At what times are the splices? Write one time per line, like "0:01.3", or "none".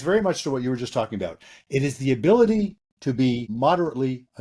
0:03.5